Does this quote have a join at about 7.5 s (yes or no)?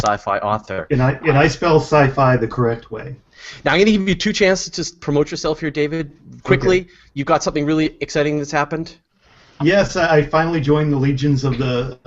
yes